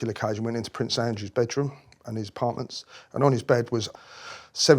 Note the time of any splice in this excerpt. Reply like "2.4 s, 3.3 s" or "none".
3.9 s